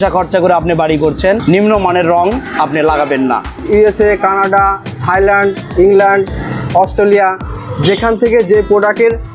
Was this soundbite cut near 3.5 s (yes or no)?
yes